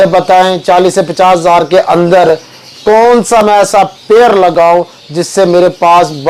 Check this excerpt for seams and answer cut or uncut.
uncut